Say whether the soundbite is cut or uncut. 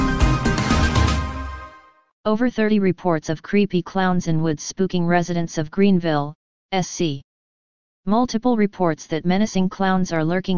uncut